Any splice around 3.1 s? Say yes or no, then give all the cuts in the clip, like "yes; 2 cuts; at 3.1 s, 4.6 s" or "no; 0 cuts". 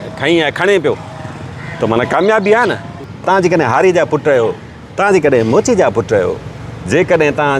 yes; 1 cut; at 3.1 s